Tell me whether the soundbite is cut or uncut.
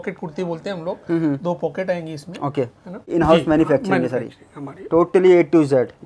cut